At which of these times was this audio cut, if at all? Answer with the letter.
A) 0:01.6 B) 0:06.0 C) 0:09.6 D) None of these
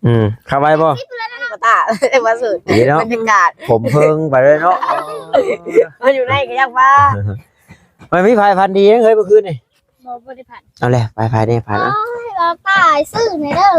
A